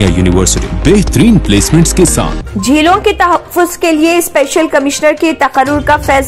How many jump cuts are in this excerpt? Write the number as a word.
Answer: one